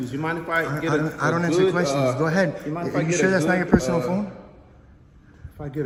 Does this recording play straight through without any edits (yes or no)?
yes